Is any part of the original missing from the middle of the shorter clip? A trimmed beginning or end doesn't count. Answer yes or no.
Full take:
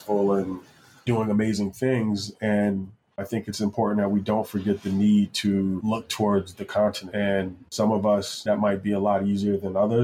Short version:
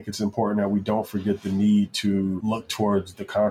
no